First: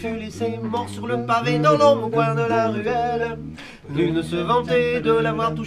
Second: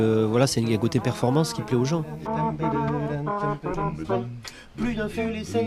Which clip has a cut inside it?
second; 1 cut; at 3.6 s

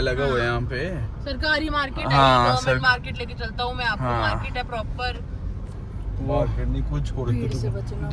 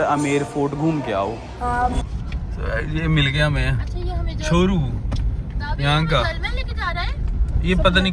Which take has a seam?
second; 1 cut; at 1.9 s

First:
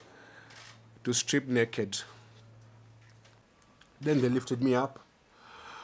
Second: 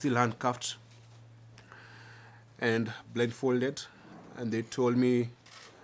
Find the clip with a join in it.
first; 1 cut; at 3.4 s

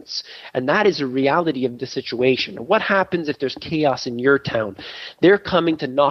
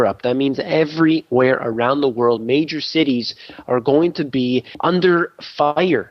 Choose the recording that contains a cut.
second; 1 cut; at 4.7 s

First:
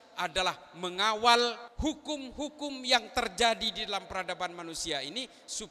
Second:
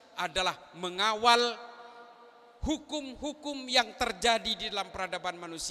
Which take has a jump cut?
first; 1 cut; at 1.7 s

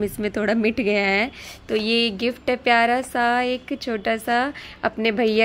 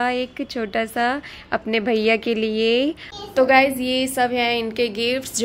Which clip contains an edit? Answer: second; 1 cut; at 3.1 s

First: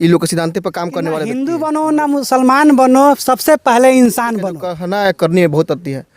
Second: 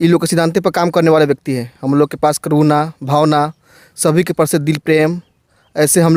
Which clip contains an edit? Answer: first; 2 cuts; at 1.3 s, 4.8 s

